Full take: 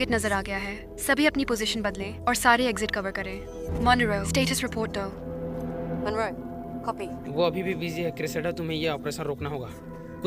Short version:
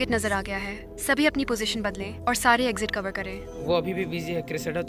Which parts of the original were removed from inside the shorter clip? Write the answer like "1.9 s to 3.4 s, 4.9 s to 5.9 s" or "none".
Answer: 3.5 s to 7.2 s